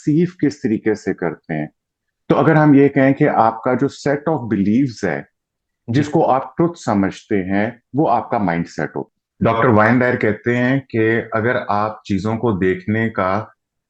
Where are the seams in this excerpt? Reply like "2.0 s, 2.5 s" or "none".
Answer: none